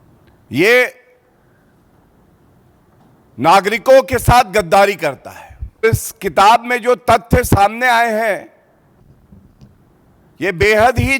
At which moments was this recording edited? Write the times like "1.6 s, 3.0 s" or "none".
5.8 s

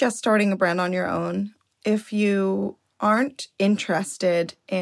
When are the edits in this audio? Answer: 1.6 s

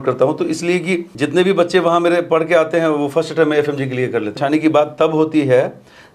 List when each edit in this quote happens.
1.1 s, 4.4 s

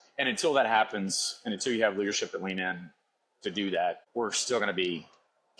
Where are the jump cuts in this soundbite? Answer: 4.0 s

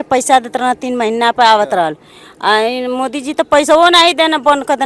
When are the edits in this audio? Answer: none

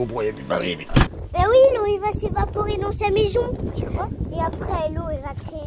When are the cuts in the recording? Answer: 1.2 s

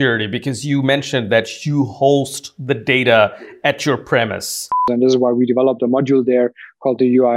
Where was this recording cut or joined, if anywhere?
4.9 s

